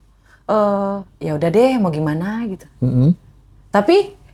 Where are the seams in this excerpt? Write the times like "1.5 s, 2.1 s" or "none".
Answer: none

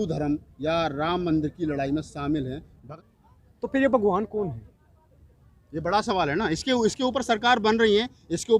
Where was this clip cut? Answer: 2.8 s

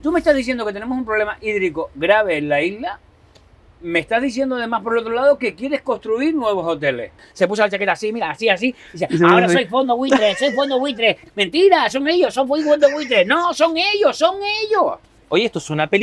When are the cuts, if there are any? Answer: 7.2 s, 15.1 s

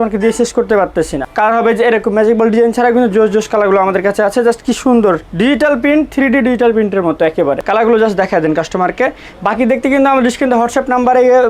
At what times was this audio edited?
1.3 s, 7.6 s

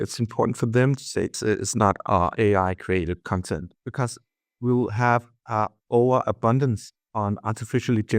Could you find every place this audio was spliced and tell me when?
1.3 s, 3.8 s

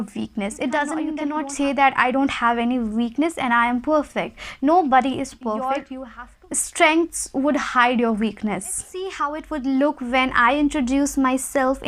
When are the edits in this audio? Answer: 1.2 s, 5.9 s, 8.7 s

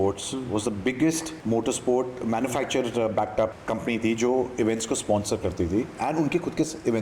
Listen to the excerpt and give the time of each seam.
1.3 s, 3.6 s

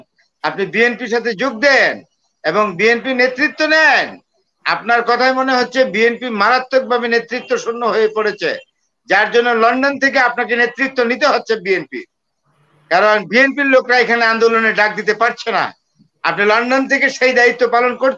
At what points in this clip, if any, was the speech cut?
none

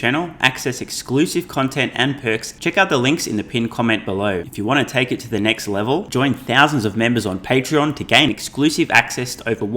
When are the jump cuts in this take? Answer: 2.5 s, 4.5 s

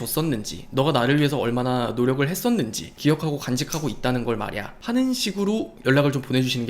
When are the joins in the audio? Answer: 2.9 s, 4.7 s

